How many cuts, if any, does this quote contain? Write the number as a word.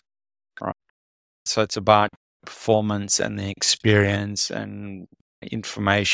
zero